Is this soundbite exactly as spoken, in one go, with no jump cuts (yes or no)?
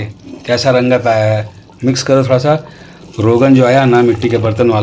yes